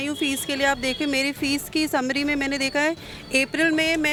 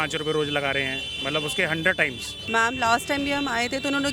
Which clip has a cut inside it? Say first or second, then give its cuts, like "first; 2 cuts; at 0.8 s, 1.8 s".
second; 1 cut; at 2.3 s